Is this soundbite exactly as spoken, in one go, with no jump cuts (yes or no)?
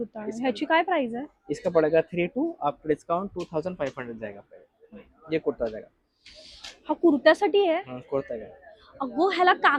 yes